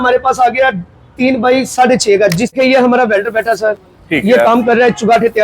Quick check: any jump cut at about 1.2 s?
no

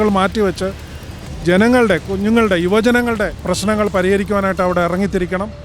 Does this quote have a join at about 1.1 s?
no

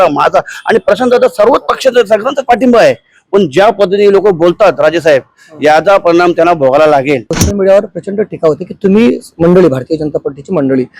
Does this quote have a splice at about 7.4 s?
yes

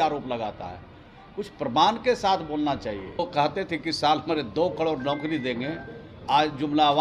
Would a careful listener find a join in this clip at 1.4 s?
no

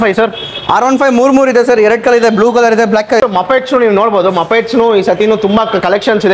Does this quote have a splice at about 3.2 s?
yes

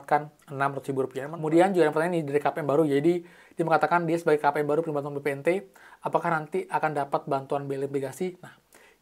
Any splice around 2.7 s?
no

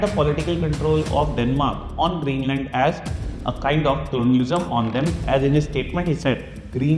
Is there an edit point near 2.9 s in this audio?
no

